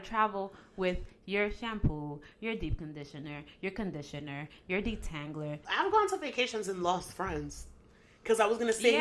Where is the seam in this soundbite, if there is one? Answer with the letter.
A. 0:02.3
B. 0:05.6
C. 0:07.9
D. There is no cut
B